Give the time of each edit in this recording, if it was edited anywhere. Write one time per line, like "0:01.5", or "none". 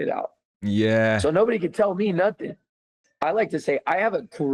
0:03.0